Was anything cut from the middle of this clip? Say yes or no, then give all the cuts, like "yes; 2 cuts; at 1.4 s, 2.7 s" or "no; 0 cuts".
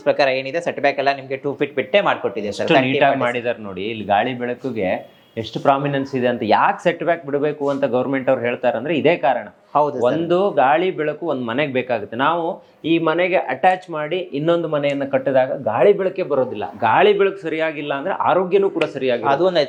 no; 0 cuts